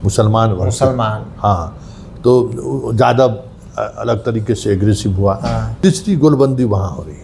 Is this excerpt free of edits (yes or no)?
no